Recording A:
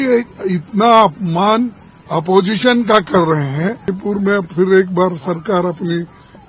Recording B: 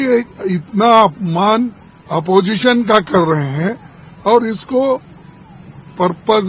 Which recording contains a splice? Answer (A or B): A